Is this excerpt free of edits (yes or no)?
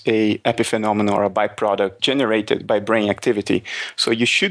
no